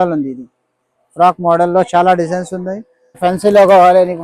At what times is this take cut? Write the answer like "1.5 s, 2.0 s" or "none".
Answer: 3.1 s